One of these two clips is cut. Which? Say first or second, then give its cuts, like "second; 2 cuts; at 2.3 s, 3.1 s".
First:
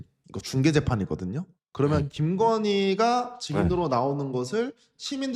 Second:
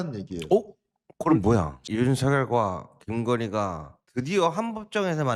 second; 1 cut; at 1.8 s